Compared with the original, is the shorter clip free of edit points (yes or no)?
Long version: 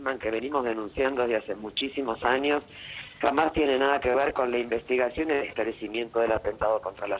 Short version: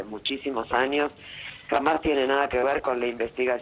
yes